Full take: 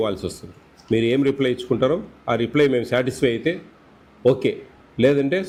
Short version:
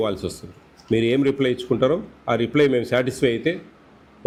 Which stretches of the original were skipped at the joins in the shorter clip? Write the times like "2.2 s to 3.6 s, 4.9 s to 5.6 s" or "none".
none